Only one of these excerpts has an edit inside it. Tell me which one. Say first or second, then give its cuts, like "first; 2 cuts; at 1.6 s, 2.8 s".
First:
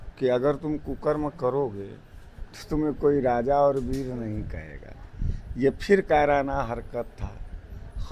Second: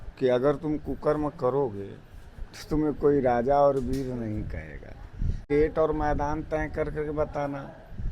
second; 1 cut; at 5.4 s